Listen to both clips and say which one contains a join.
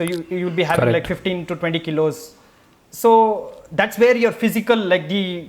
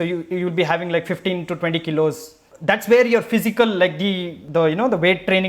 second; 2 cuts; at 2.5 s, 4.3 s

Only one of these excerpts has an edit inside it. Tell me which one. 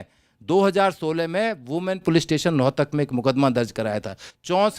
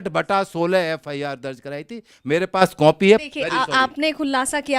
second; 1 cut; at 3.2 s

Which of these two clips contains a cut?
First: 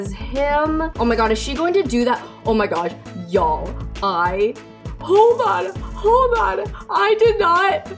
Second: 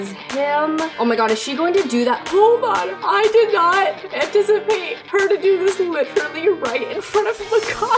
second; 2 cuts; at 2.2 s, 2.9 s

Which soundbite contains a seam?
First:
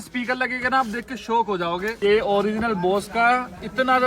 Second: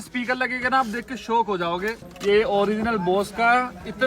first; 1 cut; at 1.9 s

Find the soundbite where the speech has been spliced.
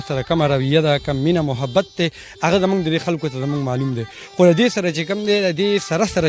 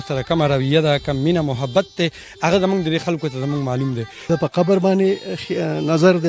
second; 1 cut; at 4.2 s

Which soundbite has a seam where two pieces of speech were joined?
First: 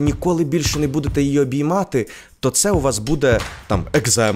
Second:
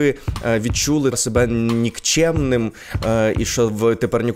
second; 1 cut; at 1.1 s

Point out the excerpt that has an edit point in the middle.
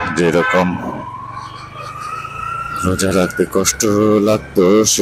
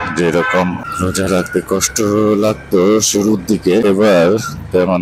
second; 2 cuts; at 0.9 s, 3.8 s

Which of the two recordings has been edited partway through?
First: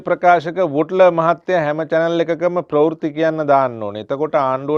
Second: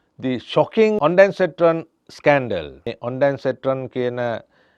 second; 2 cuts; at 1.0 s, 2.8 s

